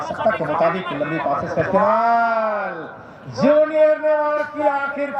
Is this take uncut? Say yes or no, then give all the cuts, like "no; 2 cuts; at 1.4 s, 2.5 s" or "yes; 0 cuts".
yes; 0 cuts